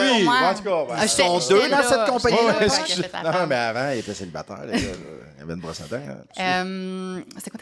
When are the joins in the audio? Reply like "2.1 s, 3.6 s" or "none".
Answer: 6.3 s